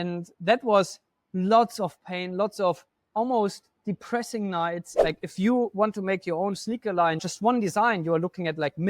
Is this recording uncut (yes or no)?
no